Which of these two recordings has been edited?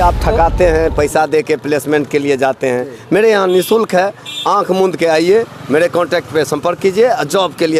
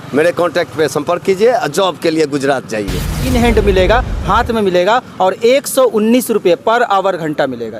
second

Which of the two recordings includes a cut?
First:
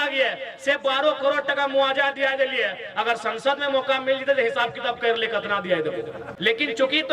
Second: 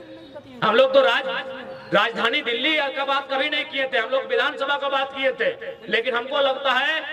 first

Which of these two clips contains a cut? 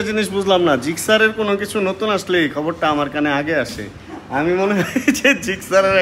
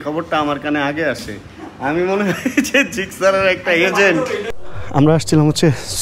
second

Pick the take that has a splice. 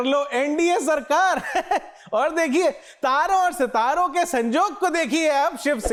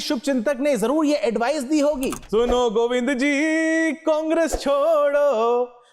second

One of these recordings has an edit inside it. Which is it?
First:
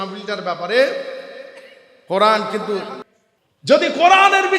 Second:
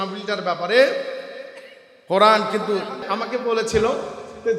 first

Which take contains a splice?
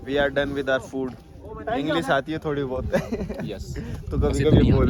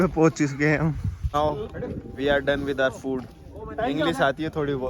second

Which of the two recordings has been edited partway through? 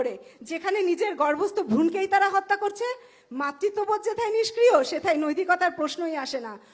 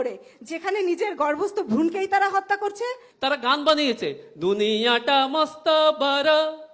second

